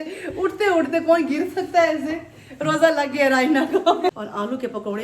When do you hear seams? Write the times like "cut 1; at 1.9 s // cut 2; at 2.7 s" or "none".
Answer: cut 1; at 4.1 s